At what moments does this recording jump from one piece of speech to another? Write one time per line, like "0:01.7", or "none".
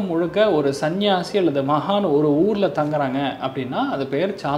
none